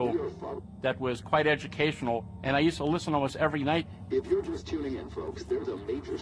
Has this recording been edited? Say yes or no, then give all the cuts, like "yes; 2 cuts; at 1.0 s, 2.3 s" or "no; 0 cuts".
yes; 1 cut; at 5.3 s